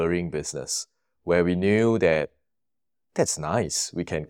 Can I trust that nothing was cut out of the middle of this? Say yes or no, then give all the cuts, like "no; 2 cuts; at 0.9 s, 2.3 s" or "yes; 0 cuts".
yes; 0 cuts